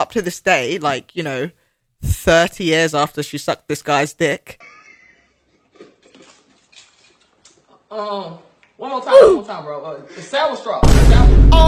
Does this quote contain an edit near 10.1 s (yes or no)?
no